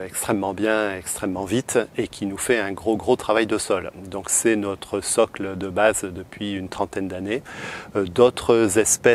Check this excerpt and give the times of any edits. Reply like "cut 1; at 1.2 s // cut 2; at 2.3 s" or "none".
none